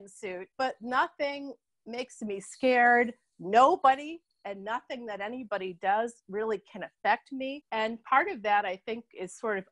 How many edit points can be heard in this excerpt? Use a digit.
0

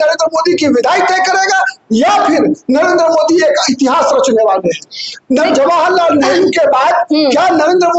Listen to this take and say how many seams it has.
0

